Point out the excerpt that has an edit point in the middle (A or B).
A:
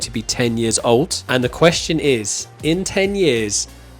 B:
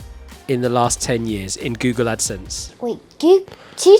A